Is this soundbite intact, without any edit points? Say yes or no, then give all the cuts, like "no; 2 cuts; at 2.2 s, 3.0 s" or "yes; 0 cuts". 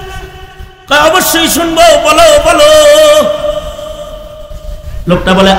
yes; 0 cuts